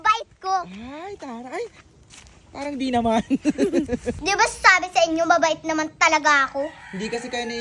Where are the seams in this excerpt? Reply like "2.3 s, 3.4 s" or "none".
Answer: 4.1 s